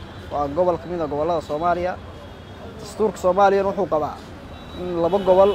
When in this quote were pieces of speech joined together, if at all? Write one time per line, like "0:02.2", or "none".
none